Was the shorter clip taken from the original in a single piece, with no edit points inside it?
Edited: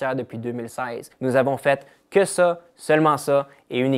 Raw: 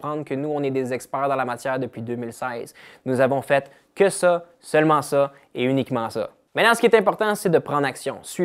no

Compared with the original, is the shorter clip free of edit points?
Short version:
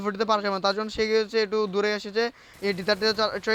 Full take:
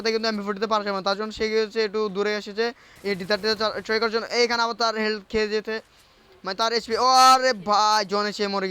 yes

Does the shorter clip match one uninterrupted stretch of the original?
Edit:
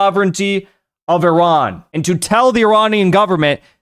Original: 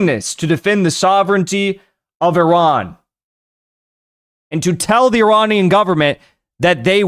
no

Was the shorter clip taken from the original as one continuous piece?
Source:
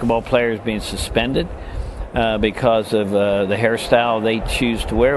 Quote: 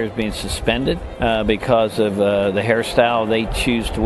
no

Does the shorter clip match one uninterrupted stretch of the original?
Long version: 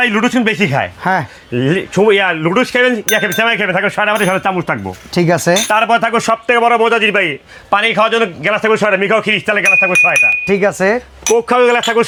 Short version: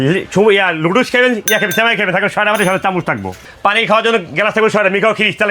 no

